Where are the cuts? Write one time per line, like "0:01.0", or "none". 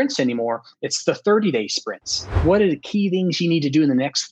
0:02.4